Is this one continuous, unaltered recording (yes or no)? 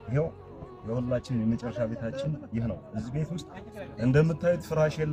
yes